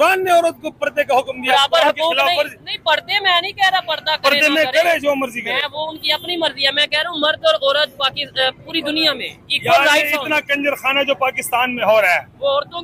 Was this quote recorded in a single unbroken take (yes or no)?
yes